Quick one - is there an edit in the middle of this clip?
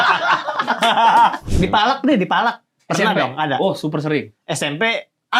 yes; 1 cut; at 1.5 s

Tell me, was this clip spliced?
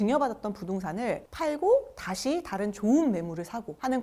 yes; 1 cut; at 1.3 s

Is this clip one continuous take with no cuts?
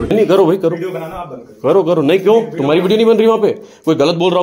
yes; 0 cuts

